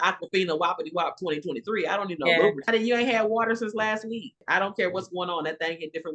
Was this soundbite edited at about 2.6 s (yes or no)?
yes